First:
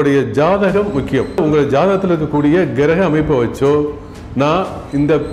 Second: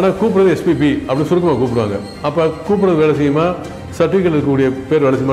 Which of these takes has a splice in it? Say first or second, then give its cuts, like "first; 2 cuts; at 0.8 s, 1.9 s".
first; 1 cut; at 1.4 s